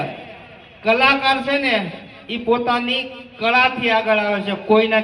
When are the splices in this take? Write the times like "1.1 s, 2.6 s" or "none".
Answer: none